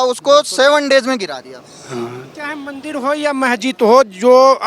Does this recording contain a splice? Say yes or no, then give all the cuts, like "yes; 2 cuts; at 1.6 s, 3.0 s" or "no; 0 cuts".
yes; 1 cut; at 2.3 s